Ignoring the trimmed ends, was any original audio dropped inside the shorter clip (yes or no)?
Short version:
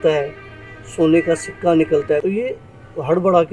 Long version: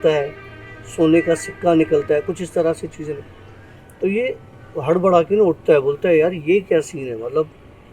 yes